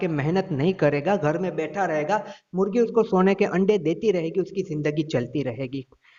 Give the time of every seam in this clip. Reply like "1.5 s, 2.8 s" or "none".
none